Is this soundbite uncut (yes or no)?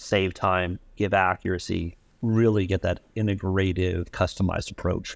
yes